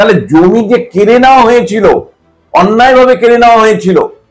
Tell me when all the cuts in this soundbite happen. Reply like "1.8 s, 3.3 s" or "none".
none

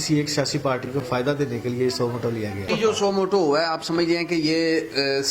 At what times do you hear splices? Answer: 0.9 s, 2.7 s

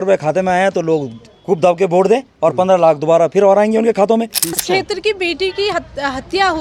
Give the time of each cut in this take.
4.5 s

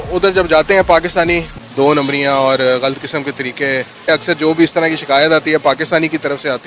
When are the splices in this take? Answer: 1.6 s, 3.9 s

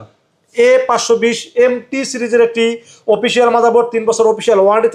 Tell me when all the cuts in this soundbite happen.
none

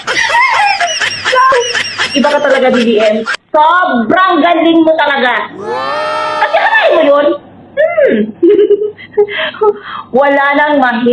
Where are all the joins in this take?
1.5 s

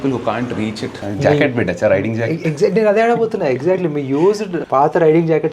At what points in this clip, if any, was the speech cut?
1.1 s, 4.6 s

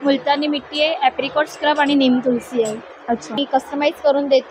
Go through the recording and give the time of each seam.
3.4 s

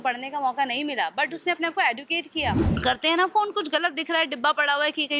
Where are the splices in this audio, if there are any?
2.7 s

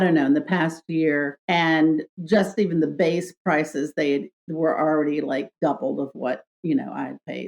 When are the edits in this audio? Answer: 1.4 s, 2.1 s

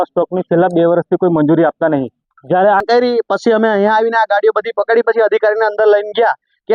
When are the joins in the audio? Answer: 2.8 s

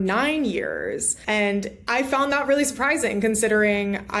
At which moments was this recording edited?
1.1 s

